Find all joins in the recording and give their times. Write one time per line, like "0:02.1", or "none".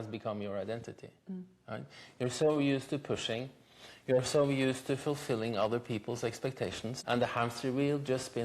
0:06.9